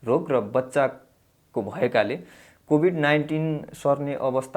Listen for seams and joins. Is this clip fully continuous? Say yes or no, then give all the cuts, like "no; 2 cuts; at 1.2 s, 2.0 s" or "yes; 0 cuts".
yes; 0 cuts